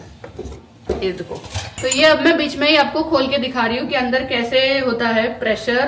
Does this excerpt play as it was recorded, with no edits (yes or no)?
no